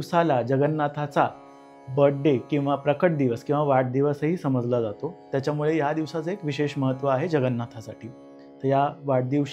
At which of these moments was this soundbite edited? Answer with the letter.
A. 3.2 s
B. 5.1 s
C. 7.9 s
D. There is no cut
D